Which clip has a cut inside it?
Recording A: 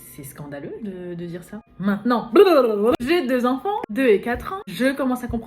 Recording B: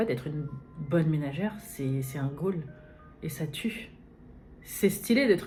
A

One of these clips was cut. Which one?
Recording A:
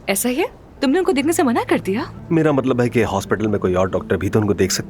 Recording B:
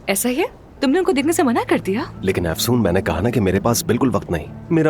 A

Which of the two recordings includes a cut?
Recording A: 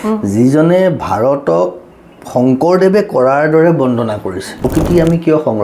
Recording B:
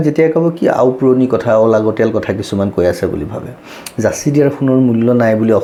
A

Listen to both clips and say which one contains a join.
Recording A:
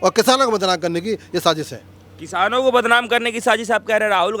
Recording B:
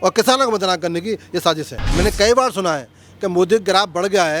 B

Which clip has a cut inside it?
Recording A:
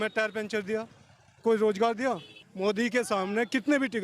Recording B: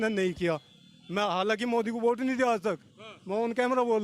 A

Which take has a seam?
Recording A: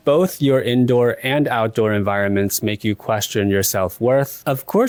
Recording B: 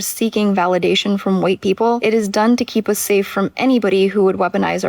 B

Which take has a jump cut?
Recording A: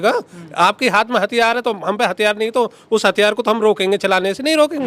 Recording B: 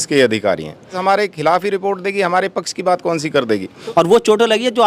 B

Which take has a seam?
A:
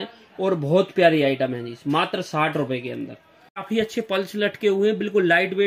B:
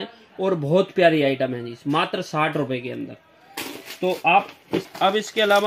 A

